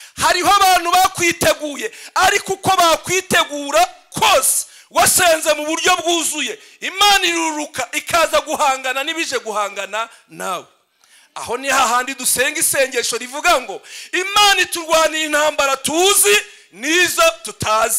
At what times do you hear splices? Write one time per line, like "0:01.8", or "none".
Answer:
none